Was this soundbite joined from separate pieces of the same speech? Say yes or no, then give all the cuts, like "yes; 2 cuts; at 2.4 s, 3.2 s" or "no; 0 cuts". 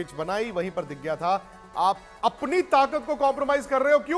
no; 0 cuts